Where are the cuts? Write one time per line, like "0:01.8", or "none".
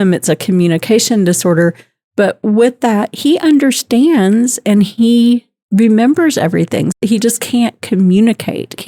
none